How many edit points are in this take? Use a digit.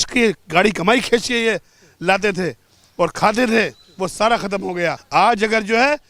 1